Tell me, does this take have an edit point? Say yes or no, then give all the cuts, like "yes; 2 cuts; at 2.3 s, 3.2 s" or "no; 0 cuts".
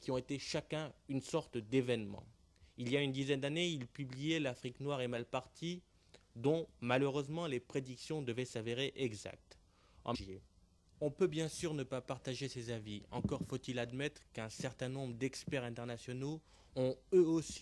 no; 0 cuts